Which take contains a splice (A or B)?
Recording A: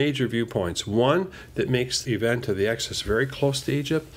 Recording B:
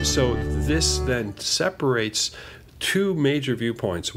A